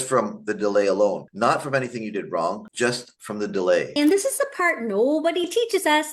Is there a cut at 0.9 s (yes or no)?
no